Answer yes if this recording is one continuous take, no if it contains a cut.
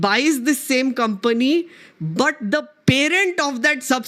yes